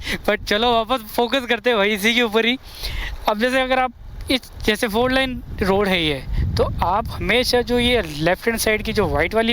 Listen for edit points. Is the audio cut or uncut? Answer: uncut